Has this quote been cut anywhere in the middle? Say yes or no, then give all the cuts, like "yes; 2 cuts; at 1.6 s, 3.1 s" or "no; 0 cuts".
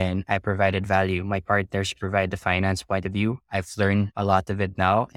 no; 0 cuts